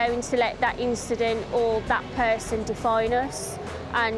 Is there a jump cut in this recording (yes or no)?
no